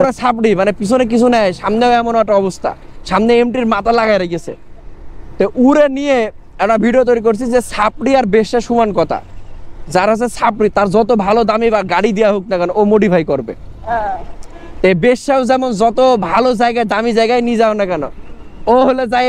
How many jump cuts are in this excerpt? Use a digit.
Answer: 0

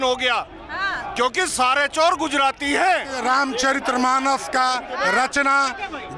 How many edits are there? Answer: 1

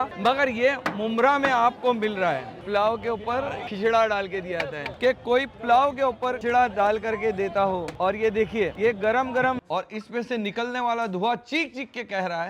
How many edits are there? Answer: 4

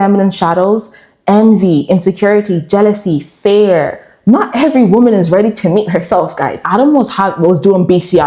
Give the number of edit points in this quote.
1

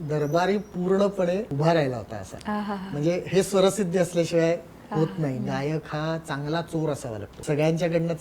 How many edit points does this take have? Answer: 3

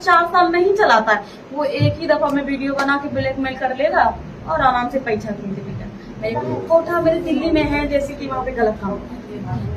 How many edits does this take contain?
1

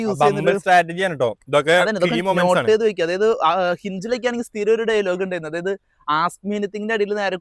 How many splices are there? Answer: 0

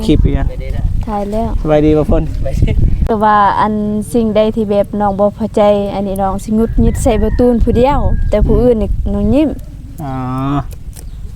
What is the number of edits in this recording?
1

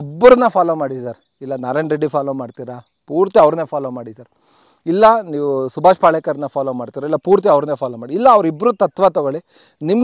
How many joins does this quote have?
0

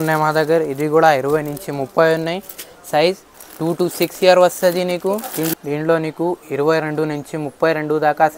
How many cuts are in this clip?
1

